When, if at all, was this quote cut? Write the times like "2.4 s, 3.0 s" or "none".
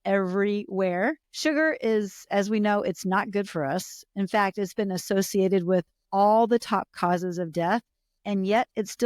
1.3 s